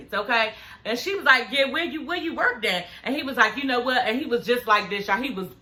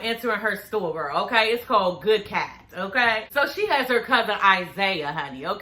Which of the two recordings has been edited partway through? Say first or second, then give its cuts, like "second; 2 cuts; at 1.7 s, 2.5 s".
second; 1 cut; at 3.3 s